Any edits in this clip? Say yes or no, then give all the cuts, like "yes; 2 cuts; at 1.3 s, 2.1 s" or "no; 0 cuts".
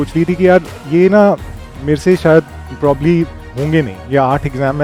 no; 0 cuts